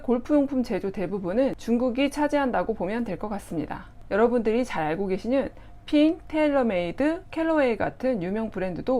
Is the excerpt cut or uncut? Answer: uncut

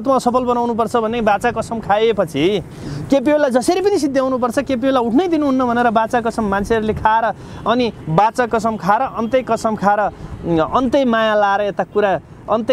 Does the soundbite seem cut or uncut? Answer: uncut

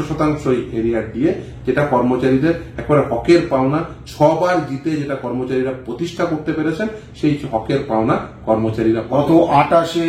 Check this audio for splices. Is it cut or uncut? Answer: cut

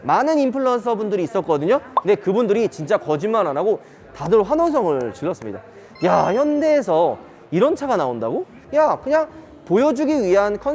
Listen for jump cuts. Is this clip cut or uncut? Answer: uncut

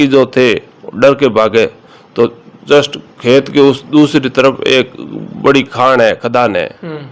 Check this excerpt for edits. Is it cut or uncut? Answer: uncut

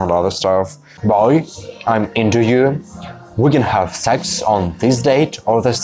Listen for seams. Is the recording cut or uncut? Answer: cut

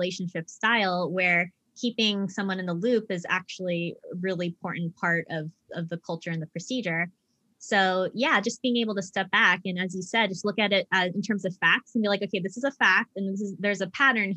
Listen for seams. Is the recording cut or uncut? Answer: uncut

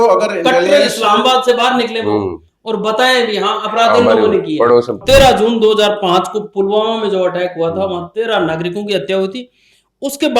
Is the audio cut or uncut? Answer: cut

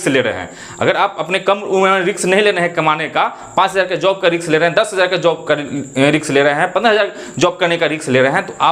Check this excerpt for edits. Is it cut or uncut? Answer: uncut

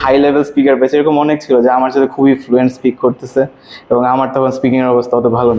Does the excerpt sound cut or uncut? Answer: uncut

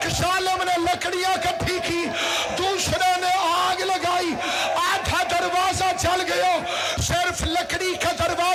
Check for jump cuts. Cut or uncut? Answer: uncut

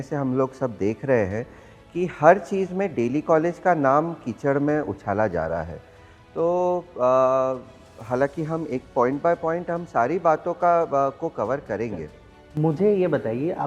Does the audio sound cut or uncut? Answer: uncut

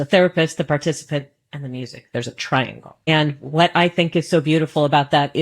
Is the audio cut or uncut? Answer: cut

